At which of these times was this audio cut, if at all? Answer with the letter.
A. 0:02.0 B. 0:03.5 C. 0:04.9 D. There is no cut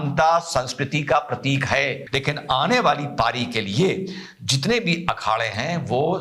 A